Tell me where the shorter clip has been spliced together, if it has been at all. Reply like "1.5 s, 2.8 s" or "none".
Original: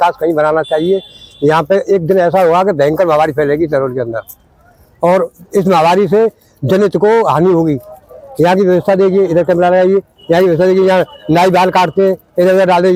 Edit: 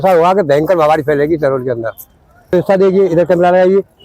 2.5 s